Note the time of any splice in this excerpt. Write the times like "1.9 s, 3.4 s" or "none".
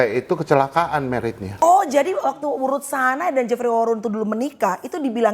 1.6 s